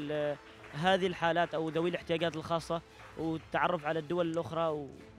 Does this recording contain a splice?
no; 0 cuts

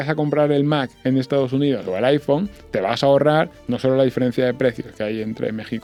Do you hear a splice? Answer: no; 0 cuts

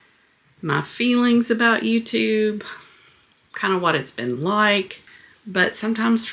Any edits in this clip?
yes; 1 cut; at 5.0 s

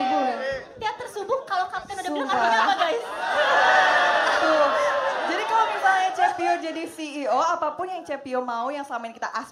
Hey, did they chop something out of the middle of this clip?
no; 0 cuts

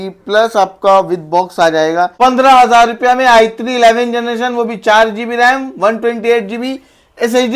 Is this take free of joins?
no; 1 cut; at 2.1 s

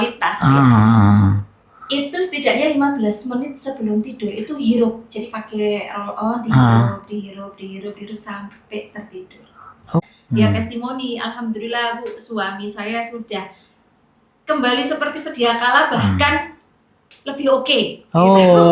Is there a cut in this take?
yes; 1 cut; at 10.0 s

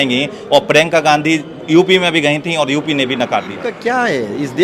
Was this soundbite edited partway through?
yes; 1 cut; at 3.6 s

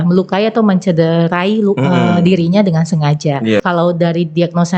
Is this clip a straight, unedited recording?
no; 1 cut; at 3.6 s

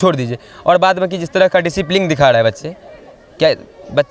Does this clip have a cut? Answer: no; 0 cuts

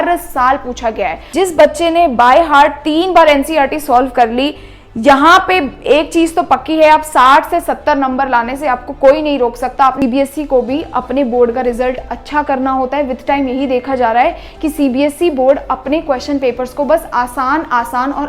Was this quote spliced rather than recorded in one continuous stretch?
yes; 2 cuts; at 1.2 s, 10.0 s

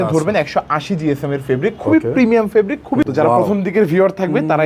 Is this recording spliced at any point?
yes; 1 cut; at 3.1 s

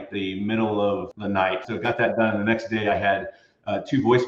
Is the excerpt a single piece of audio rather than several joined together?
no; 1 cut; at 1.5 s

